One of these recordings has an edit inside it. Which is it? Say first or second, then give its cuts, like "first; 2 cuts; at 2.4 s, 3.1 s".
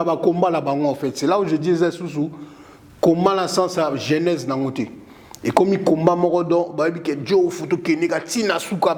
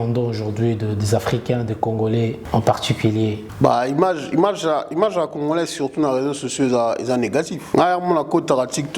second; 3 cuts; at 2.4 s, 3.5 s, 7.6 s